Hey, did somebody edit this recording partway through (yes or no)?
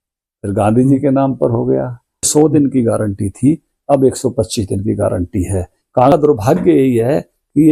yes